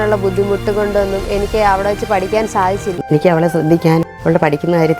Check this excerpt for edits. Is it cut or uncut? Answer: cut